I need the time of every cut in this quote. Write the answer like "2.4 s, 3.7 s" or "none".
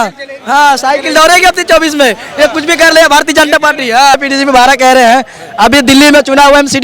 4.2 s